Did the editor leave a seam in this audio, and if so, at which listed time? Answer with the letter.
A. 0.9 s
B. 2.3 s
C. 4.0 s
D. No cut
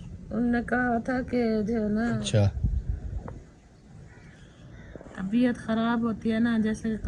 B